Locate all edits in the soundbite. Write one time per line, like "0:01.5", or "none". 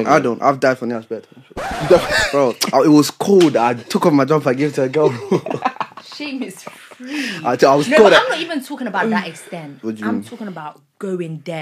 none